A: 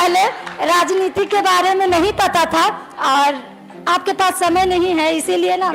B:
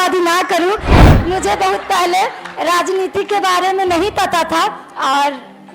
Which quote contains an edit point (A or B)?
B